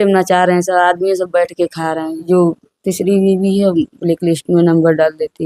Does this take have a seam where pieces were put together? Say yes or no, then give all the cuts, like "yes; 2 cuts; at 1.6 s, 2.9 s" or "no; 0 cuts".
yes; 1 cut; at 2.3 s